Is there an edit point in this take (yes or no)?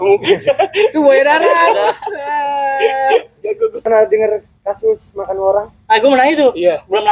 yes